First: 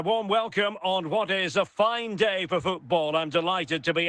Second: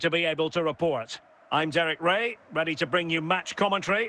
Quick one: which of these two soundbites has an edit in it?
second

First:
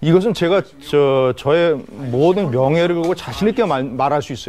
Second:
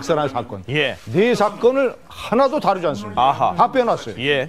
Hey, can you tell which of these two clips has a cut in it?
second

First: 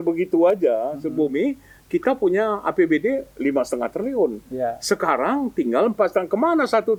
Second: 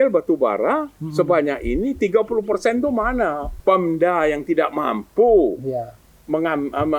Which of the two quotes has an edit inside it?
second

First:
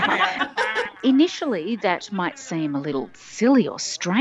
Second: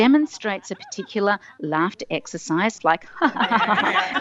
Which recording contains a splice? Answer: second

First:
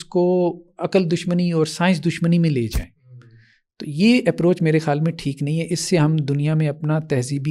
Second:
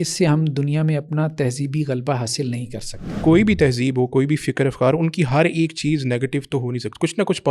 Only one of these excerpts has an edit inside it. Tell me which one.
second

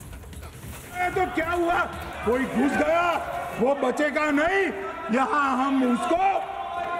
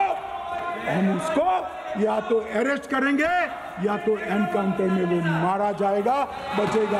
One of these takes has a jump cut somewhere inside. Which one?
first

